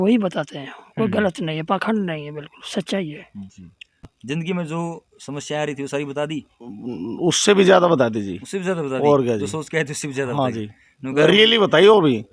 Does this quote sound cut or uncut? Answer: cut